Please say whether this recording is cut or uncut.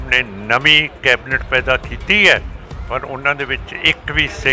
uncut